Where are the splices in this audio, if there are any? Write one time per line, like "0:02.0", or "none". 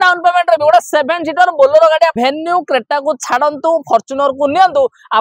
0:02.1